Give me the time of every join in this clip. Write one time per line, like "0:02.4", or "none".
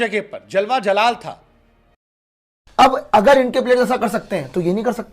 0:02.2